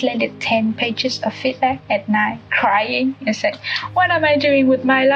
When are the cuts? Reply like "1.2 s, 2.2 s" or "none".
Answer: none